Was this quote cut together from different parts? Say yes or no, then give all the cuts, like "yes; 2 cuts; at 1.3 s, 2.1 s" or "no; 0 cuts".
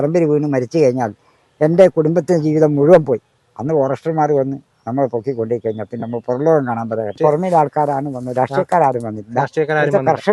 yes; 1 cut; at 7.1 s